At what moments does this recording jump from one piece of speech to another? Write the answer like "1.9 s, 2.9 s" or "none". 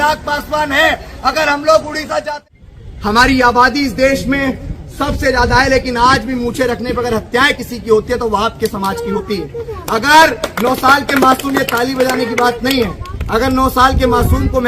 2.3 s

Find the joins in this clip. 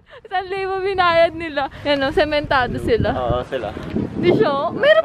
1.7 s

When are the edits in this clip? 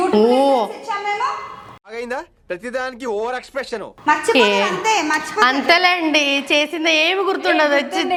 none

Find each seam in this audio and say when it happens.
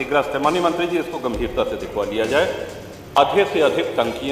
3.2 s

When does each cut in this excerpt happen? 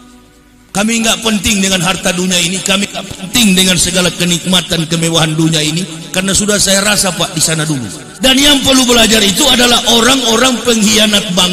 8.0 s

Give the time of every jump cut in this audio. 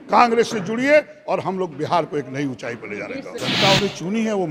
3.3 s

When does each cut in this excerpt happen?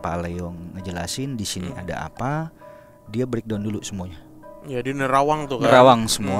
none

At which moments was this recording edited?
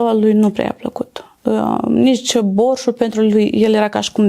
none

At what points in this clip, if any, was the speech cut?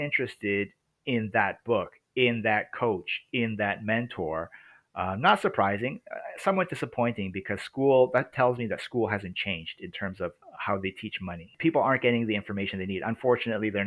10.5 s, 11.5 s

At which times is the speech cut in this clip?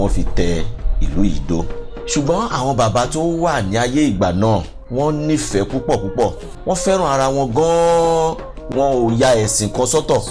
1.8 s, 4.8 s, 6.5 s, 8.7 s

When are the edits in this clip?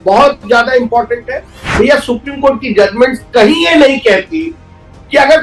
1.7 s

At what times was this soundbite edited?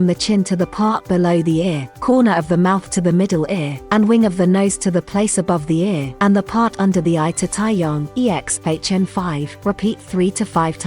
1.9 s, 3.7 s, 6.1 s, 8.1 s, 9.5 s

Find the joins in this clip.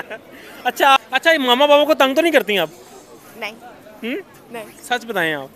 1.0 s

